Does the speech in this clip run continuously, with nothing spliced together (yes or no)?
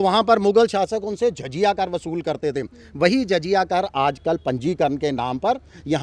yes